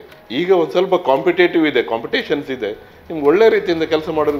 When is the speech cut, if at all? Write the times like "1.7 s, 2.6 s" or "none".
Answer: none

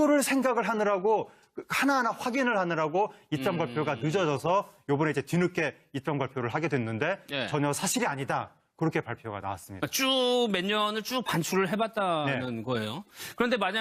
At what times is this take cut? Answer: 2.6 s

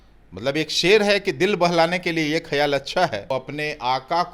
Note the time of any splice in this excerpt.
3.3 s

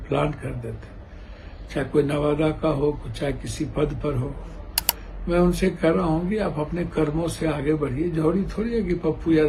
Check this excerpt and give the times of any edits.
none

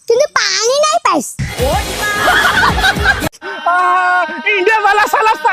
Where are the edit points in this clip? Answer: 3.3 s

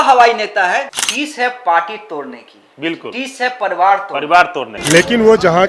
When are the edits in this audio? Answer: 0.9 s, 4.7 s

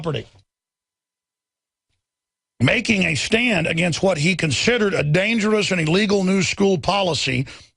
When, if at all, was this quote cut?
none

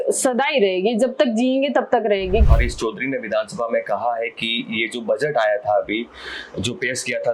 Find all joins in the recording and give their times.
2.4 s

